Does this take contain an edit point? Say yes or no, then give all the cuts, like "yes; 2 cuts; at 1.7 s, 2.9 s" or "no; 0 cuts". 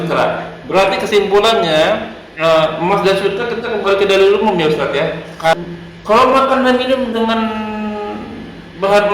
yes; 1 cut; at 5.5 s